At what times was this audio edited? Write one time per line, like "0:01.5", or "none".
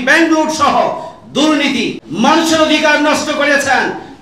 0:02.0